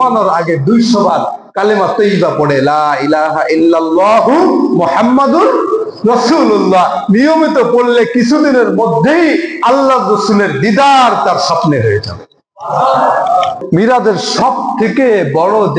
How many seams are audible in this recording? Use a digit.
1